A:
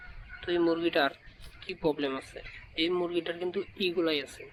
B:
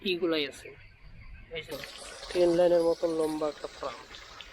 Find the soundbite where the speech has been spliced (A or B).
B